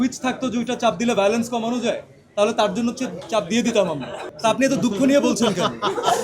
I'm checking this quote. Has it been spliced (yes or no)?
yes